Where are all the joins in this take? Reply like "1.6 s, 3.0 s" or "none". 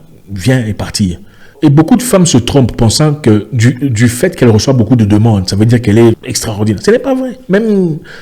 1.5 s, 6.3 s